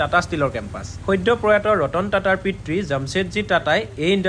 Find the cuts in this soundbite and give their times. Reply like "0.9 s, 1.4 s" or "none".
none